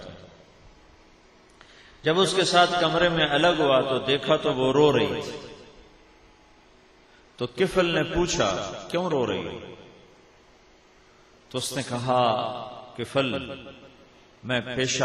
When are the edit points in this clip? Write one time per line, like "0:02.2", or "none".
0:03.3